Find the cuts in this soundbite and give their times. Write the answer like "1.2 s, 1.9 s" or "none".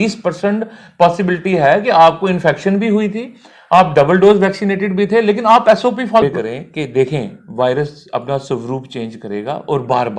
6.2 s